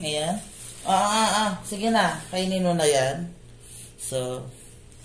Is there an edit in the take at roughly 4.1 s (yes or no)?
no